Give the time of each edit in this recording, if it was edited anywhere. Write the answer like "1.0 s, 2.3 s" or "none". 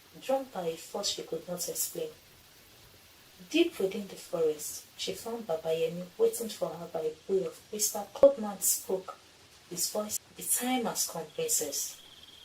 8.2 s, 10.2 s